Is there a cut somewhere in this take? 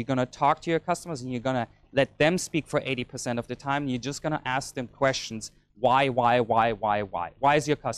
no; 0 cuts

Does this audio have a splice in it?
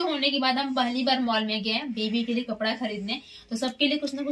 no; 0 cuts

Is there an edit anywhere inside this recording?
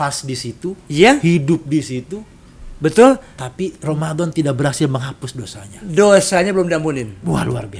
no; 0 cuts

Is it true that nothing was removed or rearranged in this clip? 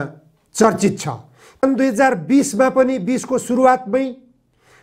no; 1 cut; at 1.6 s

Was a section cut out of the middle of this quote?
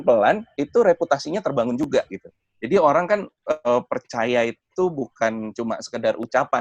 no; 0 cuts

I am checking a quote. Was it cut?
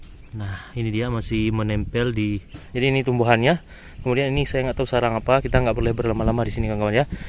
yes; 1 cut; at 2.5 s

